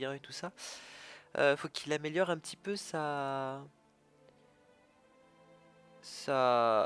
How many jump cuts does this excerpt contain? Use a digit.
1